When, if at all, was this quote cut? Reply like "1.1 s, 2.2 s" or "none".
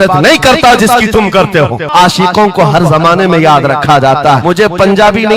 1.9 s, 4.4 s